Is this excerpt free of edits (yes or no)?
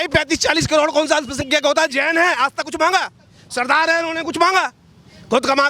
yes